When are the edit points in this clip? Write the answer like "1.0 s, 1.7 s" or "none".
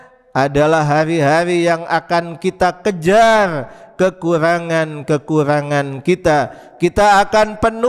none